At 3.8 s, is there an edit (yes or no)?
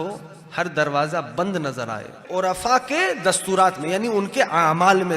no